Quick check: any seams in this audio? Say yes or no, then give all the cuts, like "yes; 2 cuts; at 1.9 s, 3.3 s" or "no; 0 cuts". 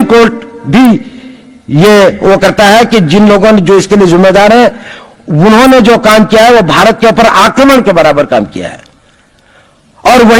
no; 0 cuts